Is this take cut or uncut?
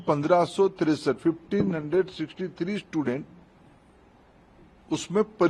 uncut